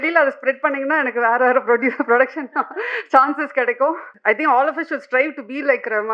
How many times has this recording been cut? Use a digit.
1